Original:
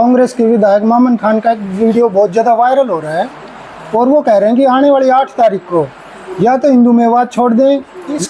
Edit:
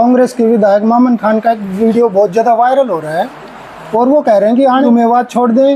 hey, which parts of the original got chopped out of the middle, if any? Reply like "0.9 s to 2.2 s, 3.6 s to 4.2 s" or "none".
4.9 s to 6.9 s